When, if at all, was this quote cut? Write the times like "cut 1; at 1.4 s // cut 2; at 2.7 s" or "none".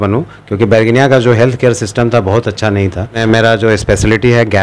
cut 1; at 3.1 s